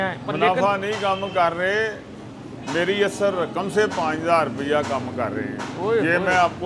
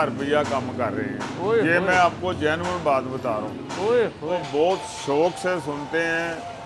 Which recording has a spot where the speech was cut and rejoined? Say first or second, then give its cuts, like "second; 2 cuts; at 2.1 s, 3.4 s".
second; 1 cut; at 4.4 s